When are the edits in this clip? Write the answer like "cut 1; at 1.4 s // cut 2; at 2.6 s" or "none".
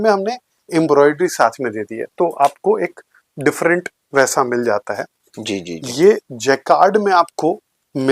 none